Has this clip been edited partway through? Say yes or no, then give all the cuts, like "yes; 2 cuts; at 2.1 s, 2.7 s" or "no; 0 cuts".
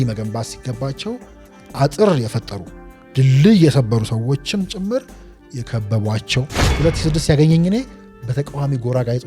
yes; 1 cut; at 6.6 s